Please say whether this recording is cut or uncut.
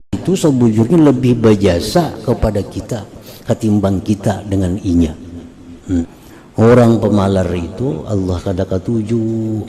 cut